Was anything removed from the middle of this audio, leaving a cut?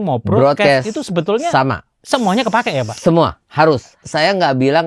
yes; 1 cut; at 3.9 s

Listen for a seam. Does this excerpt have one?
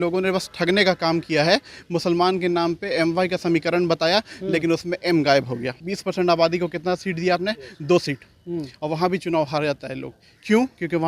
yes; 1 cut; at 5.8 s

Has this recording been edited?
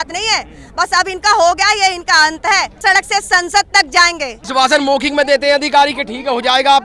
yes; 2 cuts; at 2.8 s, 4.4 s

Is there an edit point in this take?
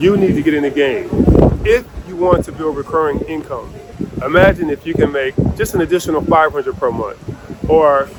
no; 0 cuts

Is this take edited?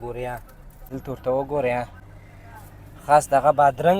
yes; 1 cut; at 0.9 s

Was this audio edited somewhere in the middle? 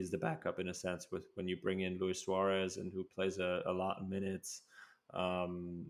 no; 0 cuts

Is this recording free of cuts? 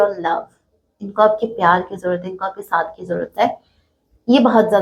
yes; 0 cuts

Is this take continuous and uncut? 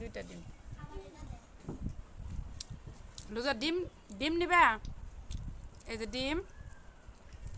yes; 0 cuts

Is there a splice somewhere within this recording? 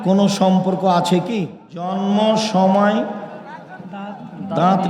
yes; 1 cut; at 2.0 s

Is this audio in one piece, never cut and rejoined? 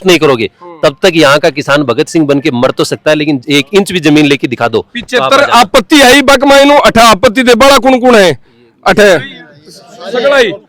yes; 0 cuts

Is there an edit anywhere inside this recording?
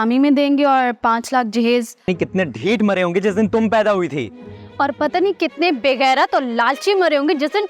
yes; 1 cut; at 2.1 s

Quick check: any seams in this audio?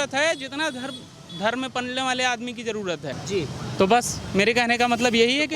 no; 0 cuts

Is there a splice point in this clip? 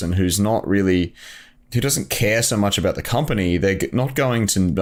no; 0 cuts

